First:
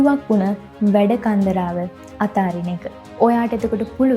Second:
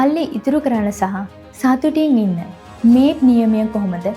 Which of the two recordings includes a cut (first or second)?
first